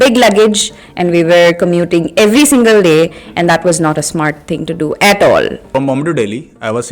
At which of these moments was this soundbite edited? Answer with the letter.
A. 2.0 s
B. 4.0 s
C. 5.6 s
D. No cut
C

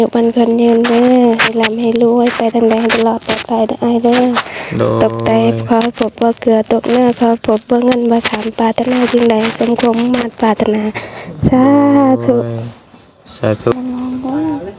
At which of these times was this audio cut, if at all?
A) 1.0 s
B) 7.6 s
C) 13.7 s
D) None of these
C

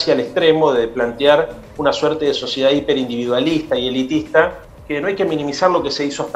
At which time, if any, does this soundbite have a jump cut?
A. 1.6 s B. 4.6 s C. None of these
B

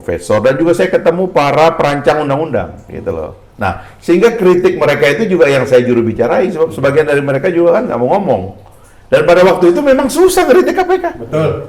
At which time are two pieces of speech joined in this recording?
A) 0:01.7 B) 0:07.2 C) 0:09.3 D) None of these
D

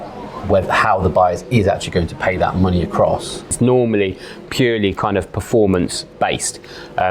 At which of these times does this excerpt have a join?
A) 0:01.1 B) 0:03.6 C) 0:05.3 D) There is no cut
B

